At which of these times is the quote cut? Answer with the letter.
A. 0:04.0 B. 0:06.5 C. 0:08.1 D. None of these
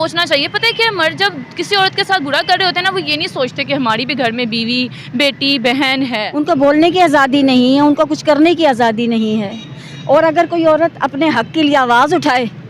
B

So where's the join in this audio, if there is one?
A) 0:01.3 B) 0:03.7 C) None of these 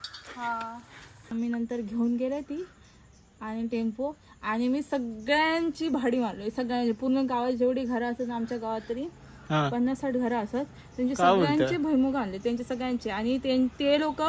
A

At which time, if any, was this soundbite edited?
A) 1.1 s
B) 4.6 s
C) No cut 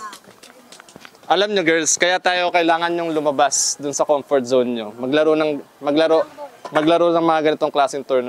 A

